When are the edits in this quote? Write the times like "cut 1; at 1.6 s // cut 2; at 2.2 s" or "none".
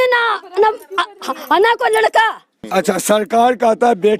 cut 1; at 2.6 s